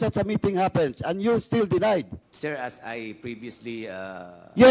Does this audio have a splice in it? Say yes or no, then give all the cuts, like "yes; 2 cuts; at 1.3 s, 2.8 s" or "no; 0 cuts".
yes; 1 cut; at 2.2 s